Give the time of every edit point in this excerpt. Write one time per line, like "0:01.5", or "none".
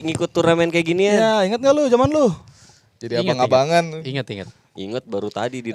none